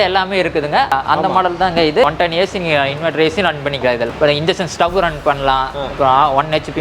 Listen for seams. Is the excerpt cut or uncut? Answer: cut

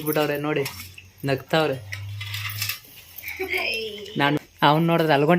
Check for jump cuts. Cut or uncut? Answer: cut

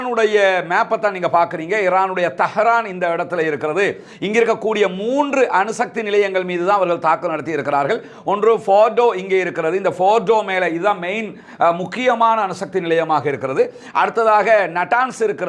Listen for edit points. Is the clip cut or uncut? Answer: uncut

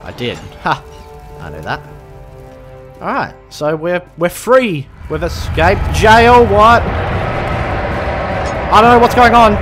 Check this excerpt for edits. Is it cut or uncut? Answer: cut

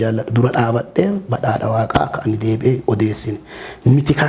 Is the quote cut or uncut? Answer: uncut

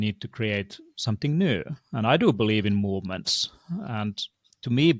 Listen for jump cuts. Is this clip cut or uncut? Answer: uncut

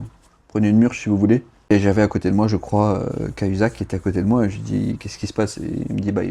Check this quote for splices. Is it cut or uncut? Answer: cut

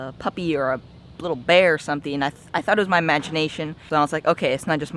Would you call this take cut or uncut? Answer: cut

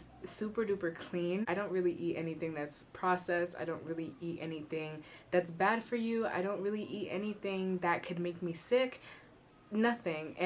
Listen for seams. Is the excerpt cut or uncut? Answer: cut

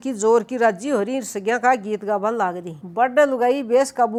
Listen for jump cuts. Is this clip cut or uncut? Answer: uncut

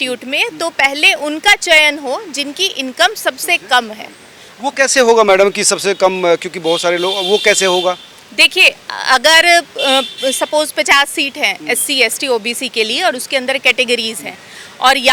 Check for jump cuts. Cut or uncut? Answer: uncut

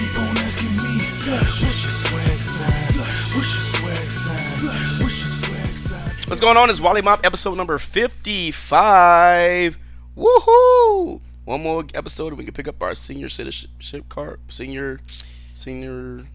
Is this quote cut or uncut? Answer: cut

